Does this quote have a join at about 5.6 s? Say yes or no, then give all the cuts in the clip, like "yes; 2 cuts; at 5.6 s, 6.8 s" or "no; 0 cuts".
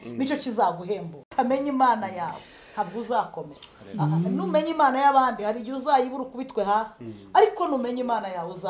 no; 1 cut; at 1.2 s